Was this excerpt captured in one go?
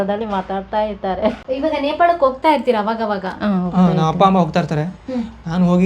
no; 1 cut; at 1.4 s

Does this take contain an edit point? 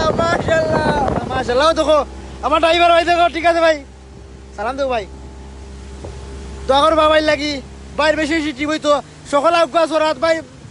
yes; 1 cut; at 1.3 s

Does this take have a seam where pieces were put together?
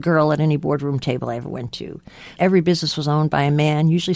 yes; 1 cut; at 2.3 s

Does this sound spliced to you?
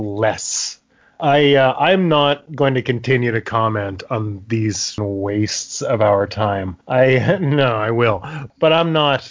yes; 2 cuts; at 5.0 s, 8.5 s

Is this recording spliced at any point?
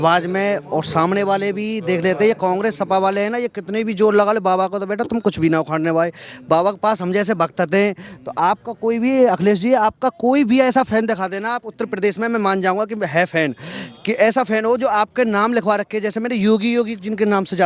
no; 0 cuts

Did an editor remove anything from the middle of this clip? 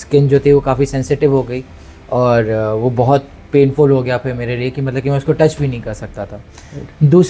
no; 0 cuts

